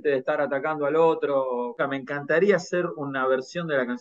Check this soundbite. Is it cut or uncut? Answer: cut